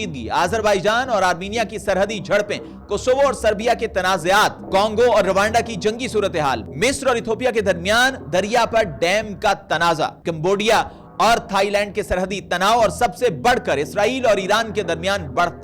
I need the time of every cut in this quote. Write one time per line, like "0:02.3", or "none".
none